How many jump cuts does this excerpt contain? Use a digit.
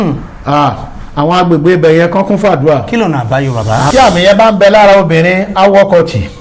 1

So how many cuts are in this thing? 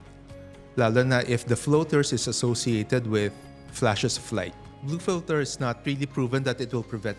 2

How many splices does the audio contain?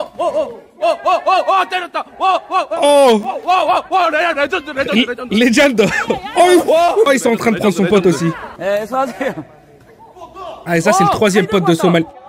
2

